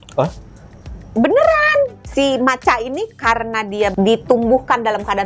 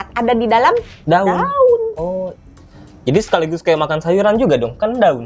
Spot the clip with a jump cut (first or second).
first